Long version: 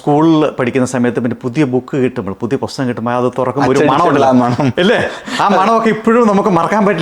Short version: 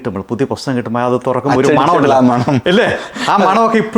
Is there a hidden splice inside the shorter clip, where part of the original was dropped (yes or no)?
no